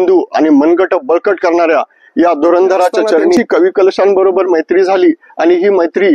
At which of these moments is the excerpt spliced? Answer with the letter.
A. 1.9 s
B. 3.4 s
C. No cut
B